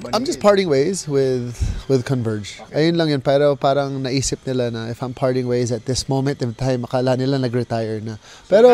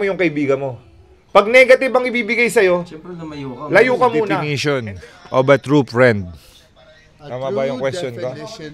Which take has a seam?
second; 1 cut; at 4.5 s

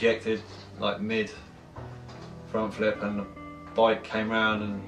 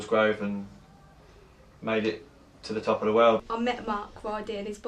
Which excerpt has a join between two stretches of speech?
second; 1 cut; at 1.9 s

